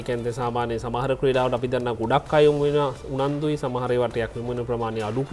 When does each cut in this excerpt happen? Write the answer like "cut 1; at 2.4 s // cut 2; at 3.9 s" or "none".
none